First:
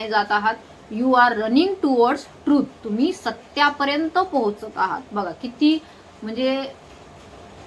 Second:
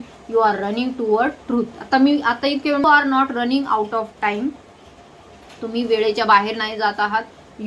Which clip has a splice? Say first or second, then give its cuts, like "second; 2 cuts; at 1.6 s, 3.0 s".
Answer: second; 1 cut; at 2.8 s